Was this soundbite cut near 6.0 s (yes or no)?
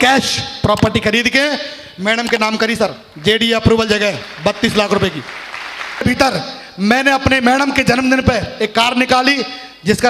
yes